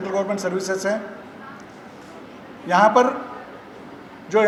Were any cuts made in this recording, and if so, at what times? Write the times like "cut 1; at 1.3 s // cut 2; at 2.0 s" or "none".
none